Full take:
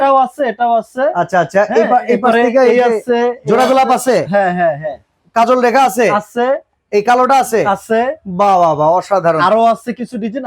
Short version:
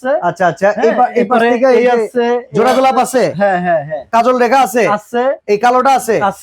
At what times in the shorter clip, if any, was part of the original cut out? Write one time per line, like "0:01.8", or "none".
0:04.0
0:05.4